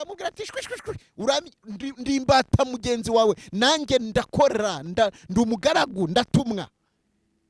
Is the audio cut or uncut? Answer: uncut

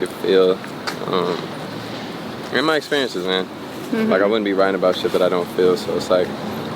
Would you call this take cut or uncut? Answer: uncut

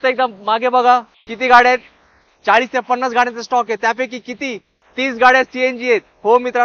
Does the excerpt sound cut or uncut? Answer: uncut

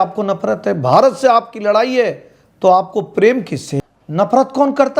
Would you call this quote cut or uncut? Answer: cut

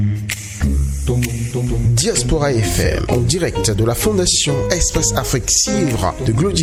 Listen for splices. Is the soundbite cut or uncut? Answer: uncut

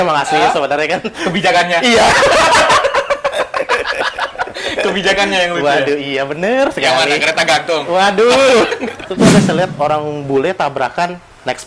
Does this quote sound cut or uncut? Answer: cut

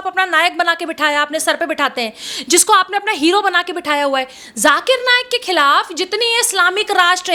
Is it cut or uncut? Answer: uncut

